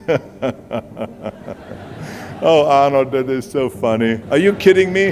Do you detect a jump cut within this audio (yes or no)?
yes